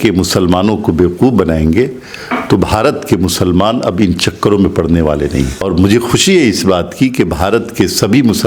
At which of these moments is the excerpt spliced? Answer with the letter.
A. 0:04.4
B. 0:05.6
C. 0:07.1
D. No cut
B